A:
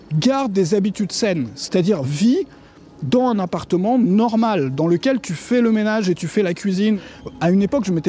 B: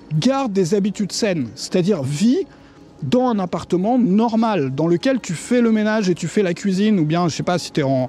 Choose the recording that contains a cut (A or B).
A